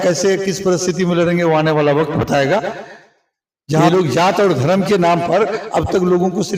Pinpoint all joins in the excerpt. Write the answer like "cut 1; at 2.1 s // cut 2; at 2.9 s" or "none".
cut 1; at 3.8 s